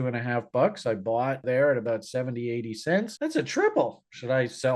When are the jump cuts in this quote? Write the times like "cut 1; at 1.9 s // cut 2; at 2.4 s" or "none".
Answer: cut 1; at 1.4 s